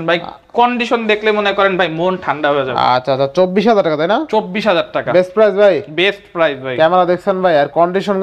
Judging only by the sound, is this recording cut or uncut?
uncut